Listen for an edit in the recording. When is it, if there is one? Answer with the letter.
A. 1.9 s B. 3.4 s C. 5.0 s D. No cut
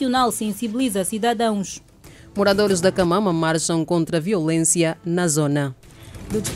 D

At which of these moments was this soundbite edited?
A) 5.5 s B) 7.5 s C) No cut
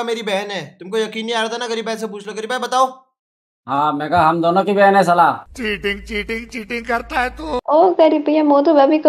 B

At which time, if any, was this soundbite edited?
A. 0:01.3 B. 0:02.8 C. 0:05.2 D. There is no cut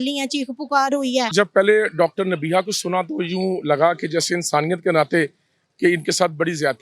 A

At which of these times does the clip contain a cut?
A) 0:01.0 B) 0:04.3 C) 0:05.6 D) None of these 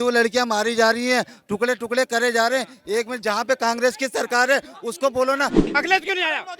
C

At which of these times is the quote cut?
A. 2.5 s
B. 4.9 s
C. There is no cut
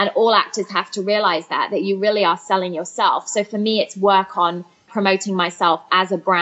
B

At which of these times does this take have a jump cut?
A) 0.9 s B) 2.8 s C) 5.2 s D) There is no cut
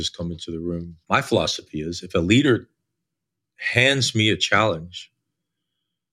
A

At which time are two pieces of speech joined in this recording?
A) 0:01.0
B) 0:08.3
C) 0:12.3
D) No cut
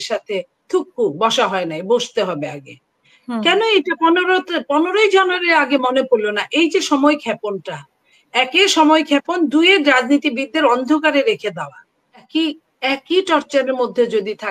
C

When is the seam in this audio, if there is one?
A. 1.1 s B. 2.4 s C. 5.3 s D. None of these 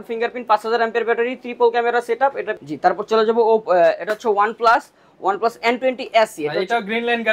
B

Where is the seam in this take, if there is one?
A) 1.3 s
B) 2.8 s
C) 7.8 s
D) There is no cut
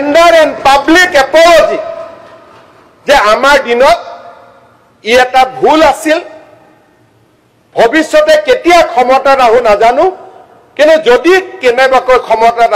D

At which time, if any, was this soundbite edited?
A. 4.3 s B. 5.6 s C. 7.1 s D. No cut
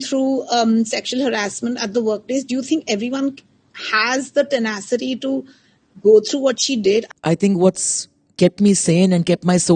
C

